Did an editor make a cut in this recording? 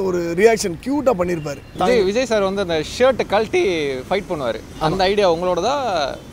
yes; 1 cut; at 1.6 s

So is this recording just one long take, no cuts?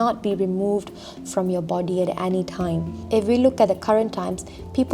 no; 1 cut; at 2.9 s

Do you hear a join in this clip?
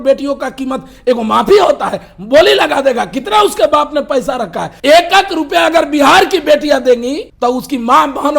yes; 2 cuts; at 4.6 s, 7.2 s

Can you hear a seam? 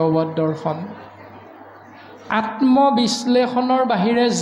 no; 0 cuts

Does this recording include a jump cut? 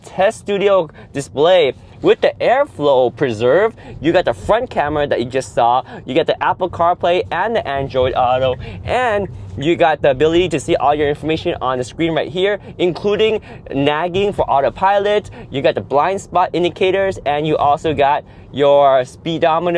no; 0 cuts

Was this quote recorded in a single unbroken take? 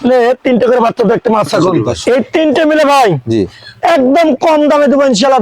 no; 1 cut; at 1.9 s

